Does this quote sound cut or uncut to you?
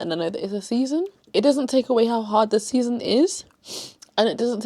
cut